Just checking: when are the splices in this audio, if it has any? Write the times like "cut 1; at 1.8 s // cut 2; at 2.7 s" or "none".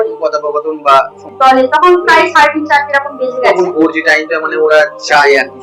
cut 1; at 1.3 s